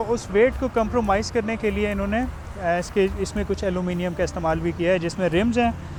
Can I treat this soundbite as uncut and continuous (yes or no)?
yes